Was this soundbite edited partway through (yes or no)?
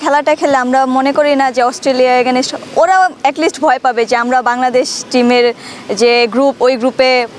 no